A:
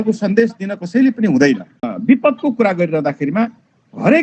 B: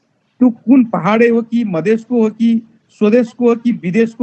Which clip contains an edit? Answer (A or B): A